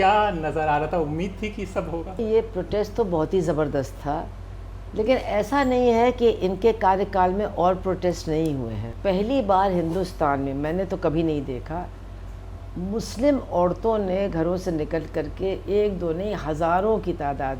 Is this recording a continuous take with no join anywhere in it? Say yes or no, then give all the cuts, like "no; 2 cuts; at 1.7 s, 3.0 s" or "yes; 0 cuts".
no; 2 cuts; at 2.2 s, 8.9 s